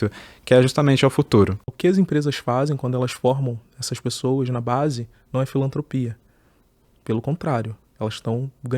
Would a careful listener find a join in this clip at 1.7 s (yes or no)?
yes